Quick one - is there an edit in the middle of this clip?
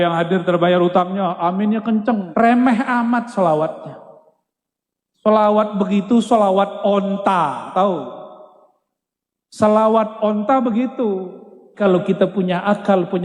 yes; 2 cuts; at 2.3 s, 11.8 s

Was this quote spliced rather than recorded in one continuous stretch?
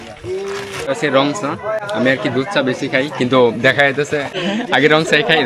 yes; 2 cuts; at 1.0 s, 4.4 s

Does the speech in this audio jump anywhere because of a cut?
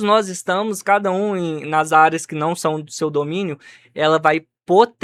no; 0 cuts

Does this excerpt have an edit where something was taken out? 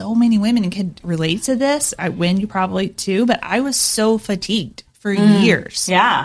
yes; 1 cut; at 1.0 s

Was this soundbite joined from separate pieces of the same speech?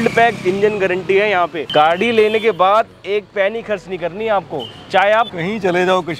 yes; 2 cuts; at 1.6 s, 5.4 s

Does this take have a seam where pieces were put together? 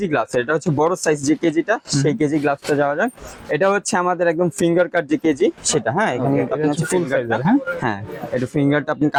no; 0 cuts

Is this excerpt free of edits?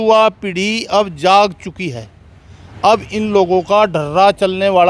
yes; 0 cuts

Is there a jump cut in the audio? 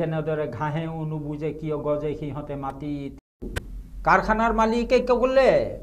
yes; 1 cut; at 3.4 s

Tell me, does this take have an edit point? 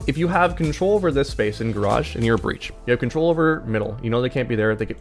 no; 0 cuts

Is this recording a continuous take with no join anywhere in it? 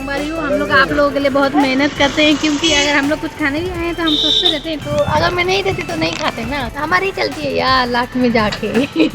no; 2 cuts; at 4.8 s, 6.7 s

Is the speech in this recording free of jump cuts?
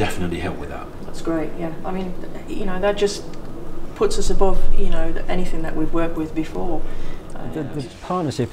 no; 1 cut; at 7.5 s

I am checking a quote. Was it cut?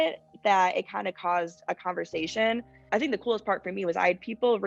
yes; 1 cut; at 2.7 s

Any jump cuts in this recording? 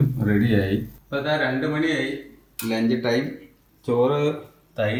no; 0 cuts

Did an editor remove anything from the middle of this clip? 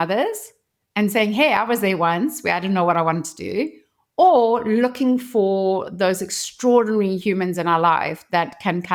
no; 0 cuts

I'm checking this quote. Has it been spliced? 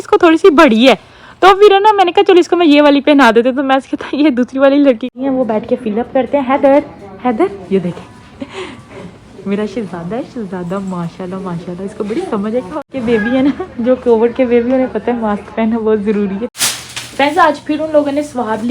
yes; 3 cuts; at 5.1 s, 12.9 s, 16.5 s

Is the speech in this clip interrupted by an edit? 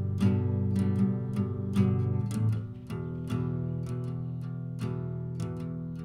no; 0 cuts

